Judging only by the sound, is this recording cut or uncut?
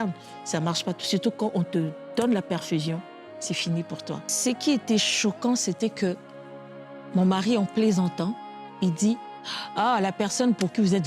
cut